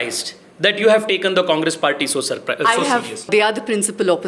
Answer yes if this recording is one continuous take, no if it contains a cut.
no